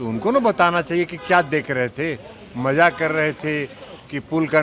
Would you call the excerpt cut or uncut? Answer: uncut